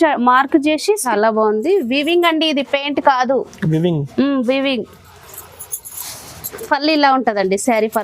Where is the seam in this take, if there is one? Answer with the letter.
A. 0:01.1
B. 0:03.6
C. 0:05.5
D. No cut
A